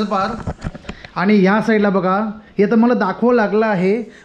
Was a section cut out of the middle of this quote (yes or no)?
no